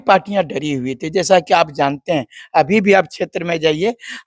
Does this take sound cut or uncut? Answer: uncut